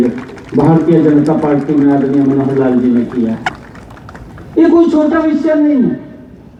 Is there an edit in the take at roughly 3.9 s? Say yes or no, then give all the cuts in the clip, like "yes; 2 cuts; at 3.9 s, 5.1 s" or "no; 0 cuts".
no; 0 cuts